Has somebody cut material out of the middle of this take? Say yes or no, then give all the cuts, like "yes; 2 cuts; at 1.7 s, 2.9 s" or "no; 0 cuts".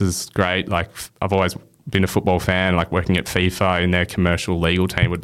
no; 0 cuts